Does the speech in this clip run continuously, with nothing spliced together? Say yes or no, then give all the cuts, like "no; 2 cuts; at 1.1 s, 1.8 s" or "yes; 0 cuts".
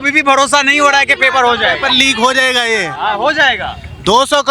yes; 0 cuts